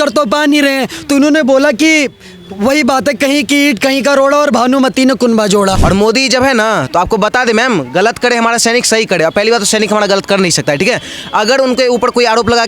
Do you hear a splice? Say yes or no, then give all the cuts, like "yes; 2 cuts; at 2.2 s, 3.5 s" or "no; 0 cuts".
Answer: yes; 1 cut; at 5.8 s